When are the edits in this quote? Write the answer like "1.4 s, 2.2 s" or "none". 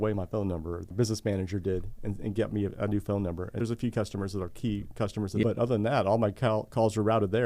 0.9 s, 3.6 s, 5.4 s